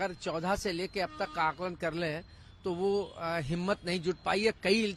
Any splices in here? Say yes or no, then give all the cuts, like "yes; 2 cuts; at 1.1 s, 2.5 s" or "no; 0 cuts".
no; 0 cuts